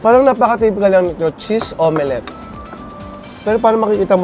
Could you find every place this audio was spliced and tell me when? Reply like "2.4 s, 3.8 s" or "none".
none